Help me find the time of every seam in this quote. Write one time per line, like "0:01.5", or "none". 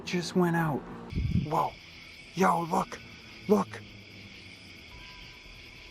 0:01.0